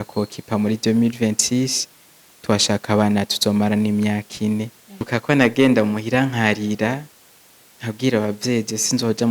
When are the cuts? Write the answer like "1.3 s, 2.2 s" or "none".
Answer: 5.1 s